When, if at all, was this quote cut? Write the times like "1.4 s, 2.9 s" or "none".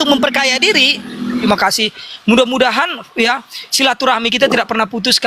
1.4 s